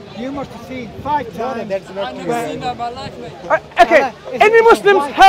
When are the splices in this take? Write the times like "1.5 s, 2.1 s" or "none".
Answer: 0.9 s